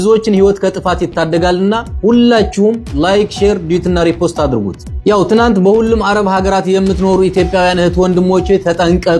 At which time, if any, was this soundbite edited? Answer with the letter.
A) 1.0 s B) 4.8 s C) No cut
C